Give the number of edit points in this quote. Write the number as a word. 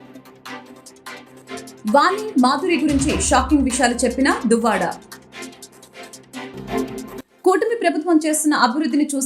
one